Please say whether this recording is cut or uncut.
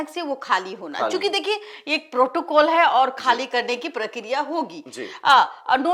uncut